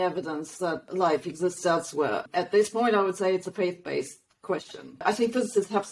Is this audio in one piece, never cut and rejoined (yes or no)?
no